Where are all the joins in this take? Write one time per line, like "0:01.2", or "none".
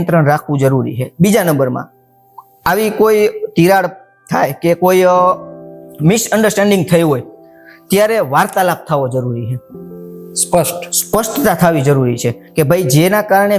none